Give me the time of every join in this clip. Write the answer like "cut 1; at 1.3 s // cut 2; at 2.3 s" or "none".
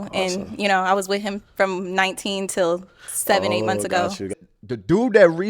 cut 1; at 4.4 s